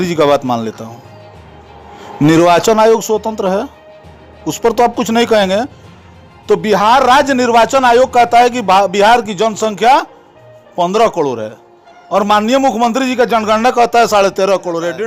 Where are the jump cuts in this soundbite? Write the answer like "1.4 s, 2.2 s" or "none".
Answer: none